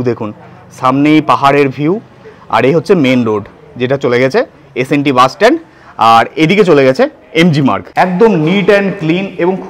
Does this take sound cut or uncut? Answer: cut